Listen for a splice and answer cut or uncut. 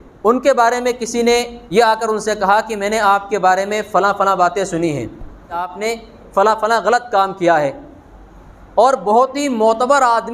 cut